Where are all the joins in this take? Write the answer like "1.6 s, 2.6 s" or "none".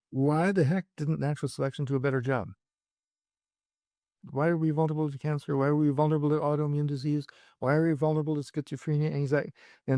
4.2 s